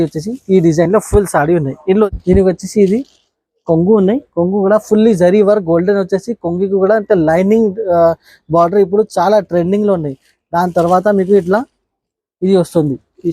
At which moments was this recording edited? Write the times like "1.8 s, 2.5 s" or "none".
2.1 s